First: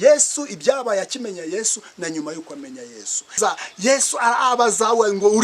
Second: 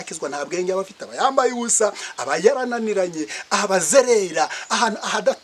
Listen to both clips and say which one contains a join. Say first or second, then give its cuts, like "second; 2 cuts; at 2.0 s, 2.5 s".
first; 1 cut; at 3.4 s